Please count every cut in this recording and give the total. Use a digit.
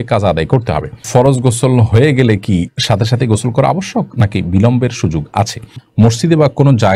2